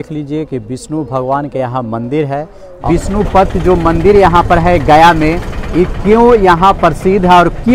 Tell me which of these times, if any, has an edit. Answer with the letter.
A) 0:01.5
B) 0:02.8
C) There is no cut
B